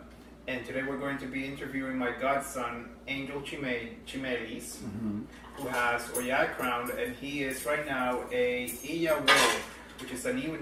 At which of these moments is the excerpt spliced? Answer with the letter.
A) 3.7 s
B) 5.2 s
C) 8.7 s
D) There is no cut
D